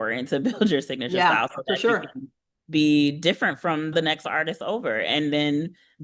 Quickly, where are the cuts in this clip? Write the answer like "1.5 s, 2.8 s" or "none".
3.9 s